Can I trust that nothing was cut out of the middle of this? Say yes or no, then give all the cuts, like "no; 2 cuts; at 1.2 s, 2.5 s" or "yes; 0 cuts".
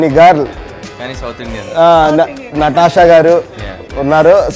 yes; 0 cuts